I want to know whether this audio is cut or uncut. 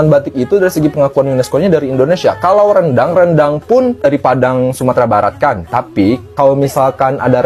uncut